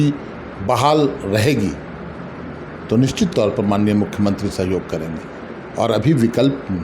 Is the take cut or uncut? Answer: uncut